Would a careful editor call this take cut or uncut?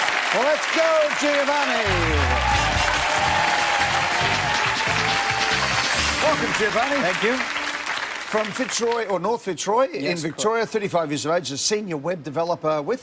cut